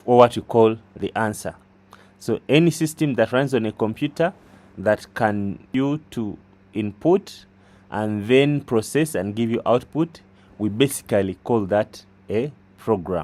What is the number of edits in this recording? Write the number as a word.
one